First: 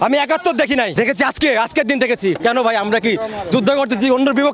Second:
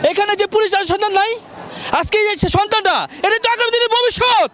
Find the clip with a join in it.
first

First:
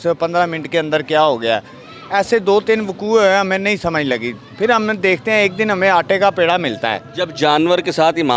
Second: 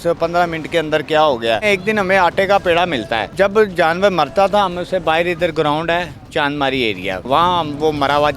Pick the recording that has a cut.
second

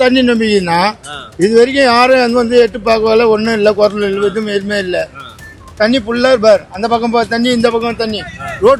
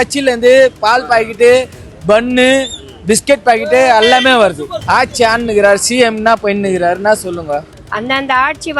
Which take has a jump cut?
second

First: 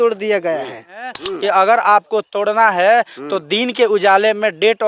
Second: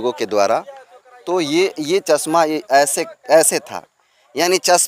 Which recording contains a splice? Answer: first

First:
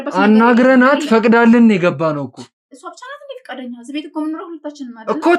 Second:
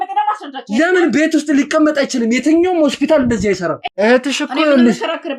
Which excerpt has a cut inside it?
second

